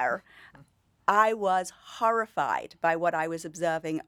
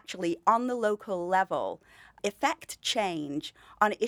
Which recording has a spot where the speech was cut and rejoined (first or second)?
second